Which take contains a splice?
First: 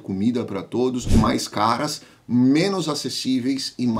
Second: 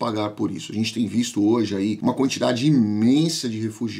first; 1 cut; at 1.1 s

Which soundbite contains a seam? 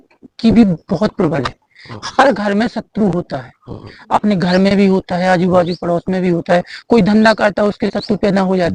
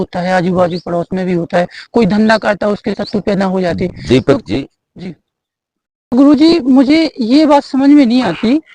second; 1 cut; at 6.1 s

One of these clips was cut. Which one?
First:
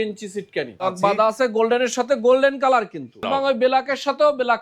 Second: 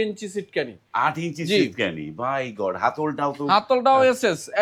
first; 2 cuts; at 0.9 s, 3.3 s

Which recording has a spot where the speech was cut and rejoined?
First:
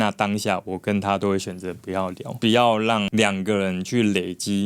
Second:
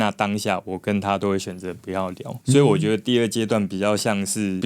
first; 1 cut; at 2.4 s

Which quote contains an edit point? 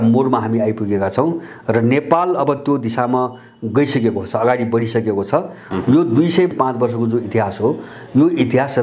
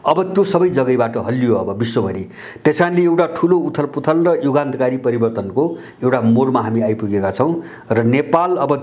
first; 2 cuts; at 5.6 s, 6.5 s

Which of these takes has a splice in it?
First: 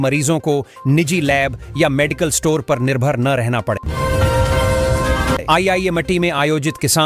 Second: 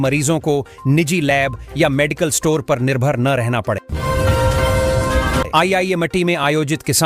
second; 2 cuts; at 3.9 s, 5.5 s

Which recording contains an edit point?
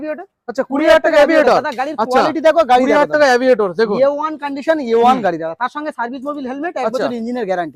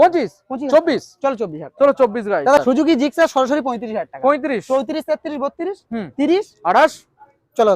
second; 1 cut; at 2.6 s

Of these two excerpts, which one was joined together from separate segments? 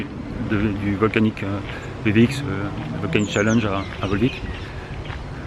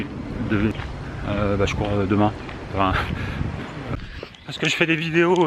second; 2 cuts; at 0.7 s, 3.9 s

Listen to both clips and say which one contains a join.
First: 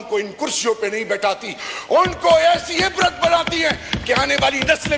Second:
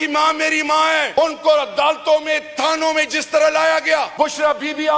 second; 2 cuts; at 1.1 s, 4.1 s

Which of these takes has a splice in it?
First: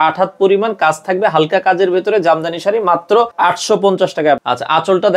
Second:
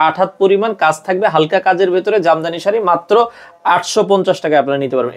first; 2 cuts; at 3.3 s, 4.4 s

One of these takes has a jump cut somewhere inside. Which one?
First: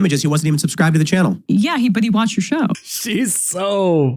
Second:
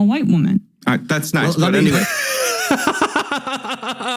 first; 2 cuts; at 1.4 s, 2.7 s

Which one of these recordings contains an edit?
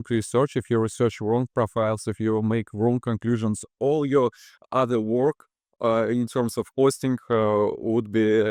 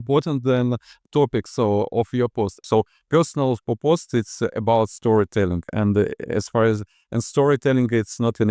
second; 1 cut; at 2.6 s

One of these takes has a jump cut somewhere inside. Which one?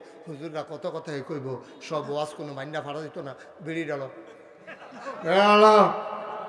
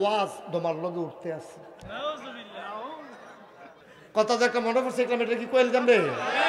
second; 1 cut; at 3.7 s

